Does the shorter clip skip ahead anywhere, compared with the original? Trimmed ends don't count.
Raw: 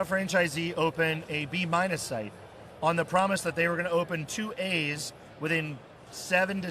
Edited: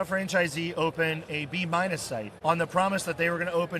yes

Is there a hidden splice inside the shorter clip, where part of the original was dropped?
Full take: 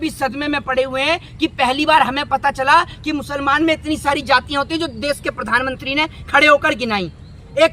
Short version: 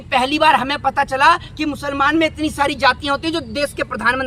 no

